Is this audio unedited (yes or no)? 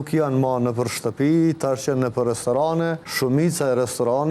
no